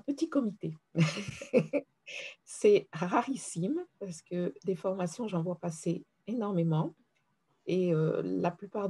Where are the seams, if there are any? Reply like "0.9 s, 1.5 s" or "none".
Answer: none